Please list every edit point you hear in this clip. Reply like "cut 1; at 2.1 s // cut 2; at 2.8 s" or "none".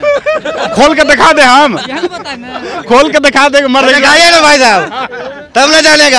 none